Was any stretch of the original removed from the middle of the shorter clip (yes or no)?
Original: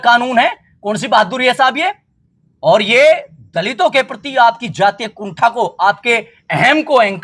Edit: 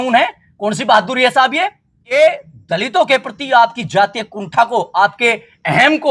yes